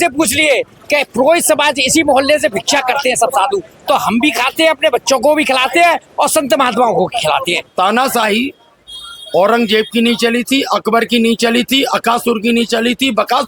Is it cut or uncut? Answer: cut